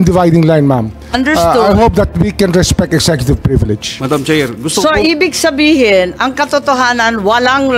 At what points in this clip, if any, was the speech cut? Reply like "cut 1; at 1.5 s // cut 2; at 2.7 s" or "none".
cut 1; at 3.9 s